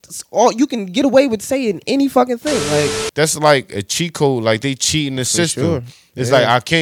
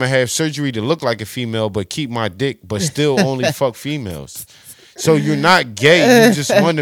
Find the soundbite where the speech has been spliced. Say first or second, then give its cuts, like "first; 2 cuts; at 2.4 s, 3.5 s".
first; 1 cut; at 3.0 s